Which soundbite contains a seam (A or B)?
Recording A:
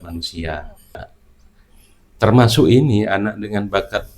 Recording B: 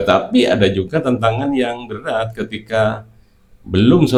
A